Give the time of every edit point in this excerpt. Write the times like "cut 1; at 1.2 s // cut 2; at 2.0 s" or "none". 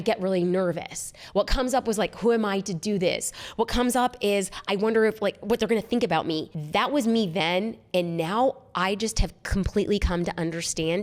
none